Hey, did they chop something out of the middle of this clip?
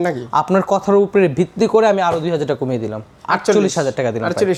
no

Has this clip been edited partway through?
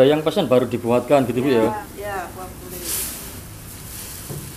yes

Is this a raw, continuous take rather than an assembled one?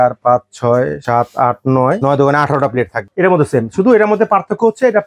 no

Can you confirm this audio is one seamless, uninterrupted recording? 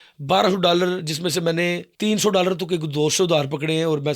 no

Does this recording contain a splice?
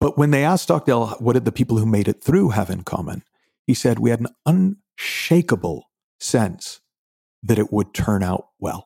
yes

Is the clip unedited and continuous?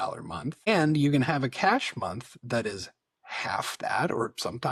yes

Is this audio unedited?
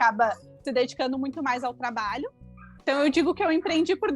no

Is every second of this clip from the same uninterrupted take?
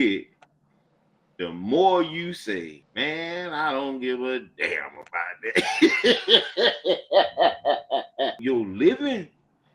no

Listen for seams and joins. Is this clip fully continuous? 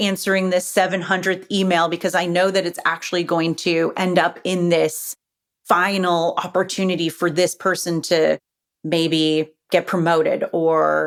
yes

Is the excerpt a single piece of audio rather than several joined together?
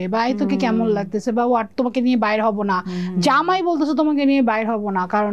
yes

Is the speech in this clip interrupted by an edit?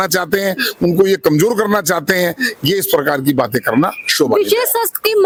no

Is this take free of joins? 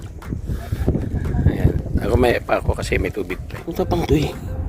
no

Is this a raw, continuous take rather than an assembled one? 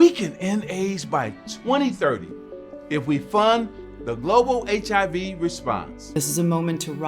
no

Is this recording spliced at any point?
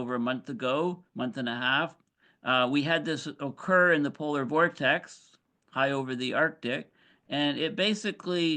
no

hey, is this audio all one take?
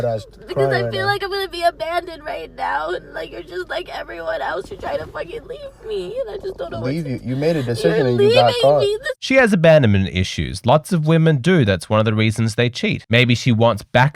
yes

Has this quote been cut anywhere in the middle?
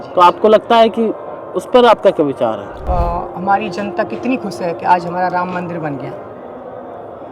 yes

